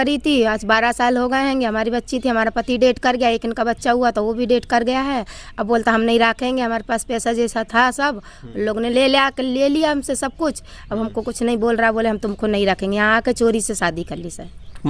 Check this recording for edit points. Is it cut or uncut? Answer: uncut